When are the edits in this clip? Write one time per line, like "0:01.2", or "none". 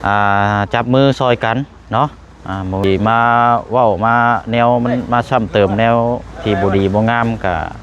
0:02.8